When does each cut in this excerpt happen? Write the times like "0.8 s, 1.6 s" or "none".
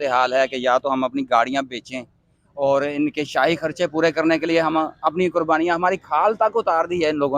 none